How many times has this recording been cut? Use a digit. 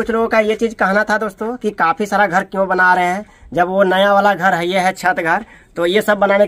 0